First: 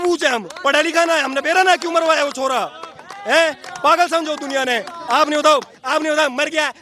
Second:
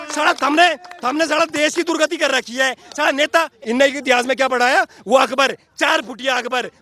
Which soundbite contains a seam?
second; 1 cut; at 3.5 s

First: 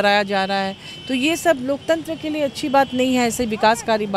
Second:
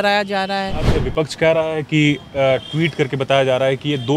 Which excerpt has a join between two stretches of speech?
second; 1 cut; at 0.9 s

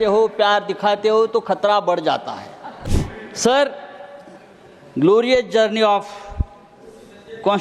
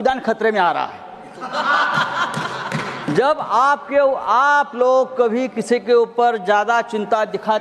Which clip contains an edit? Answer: first; 1 cut; at 2.8 s

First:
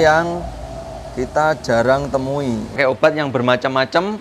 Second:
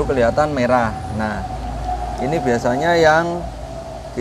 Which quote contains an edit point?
first; 1 cut; at 2.8 s

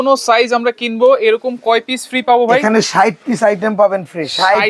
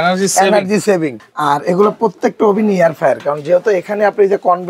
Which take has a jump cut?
second; 1 cut; at 1.2 s

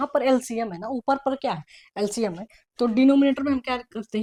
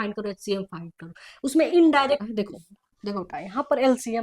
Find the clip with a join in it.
second; 1 cut; at 2.2 s

